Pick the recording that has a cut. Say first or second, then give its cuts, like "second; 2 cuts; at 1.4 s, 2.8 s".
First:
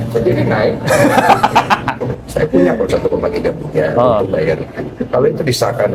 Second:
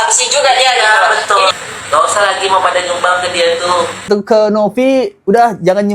second; 2 cuts; at 1.5 s, 4.1 s